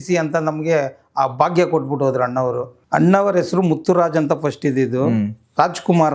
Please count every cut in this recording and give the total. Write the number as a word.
one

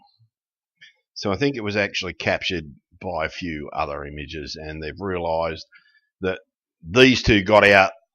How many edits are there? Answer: one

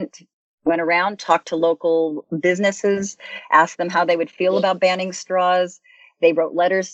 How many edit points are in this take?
zero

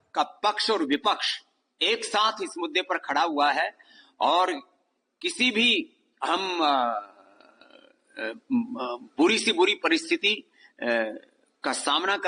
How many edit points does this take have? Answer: zero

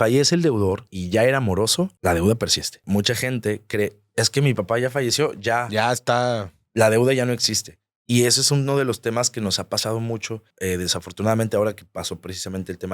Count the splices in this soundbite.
four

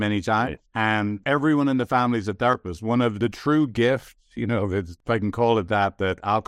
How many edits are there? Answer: two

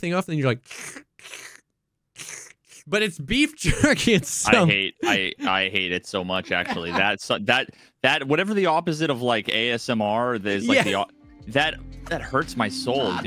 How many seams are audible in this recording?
one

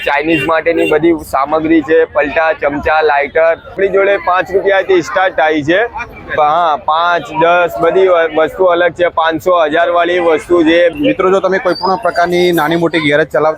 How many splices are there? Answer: two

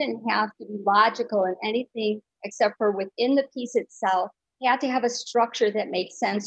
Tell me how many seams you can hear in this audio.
one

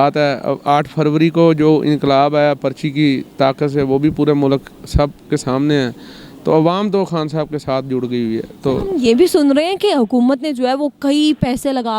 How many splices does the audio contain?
zero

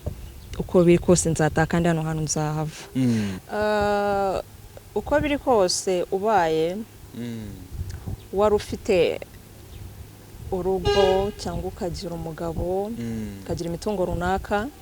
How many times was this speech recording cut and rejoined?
one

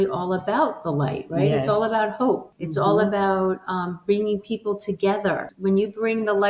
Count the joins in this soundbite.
two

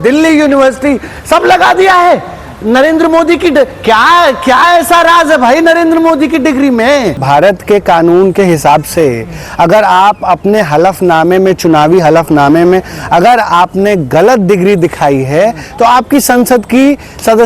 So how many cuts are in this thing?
one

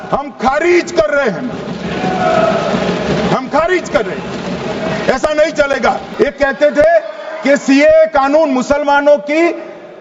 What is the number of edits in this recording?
one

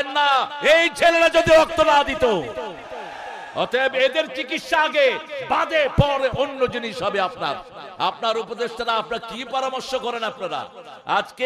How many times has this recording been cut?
zero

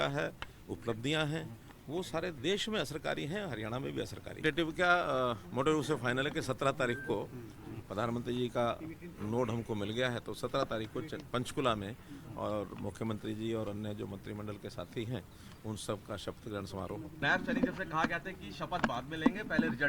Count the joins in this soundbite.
two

